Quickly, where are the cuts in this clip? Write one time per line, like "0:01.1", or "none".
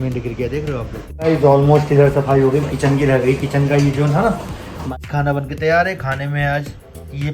0:01.1
0:04.9